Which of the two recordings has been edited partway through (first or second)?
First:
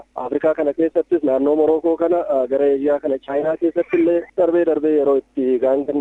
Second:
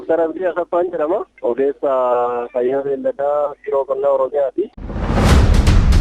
second